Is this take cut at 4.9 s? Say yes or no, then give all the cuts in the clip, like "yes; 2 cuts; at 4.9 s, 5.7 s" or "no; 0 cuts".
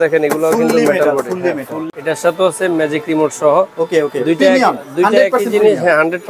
no; 1 cut; at 1.7 s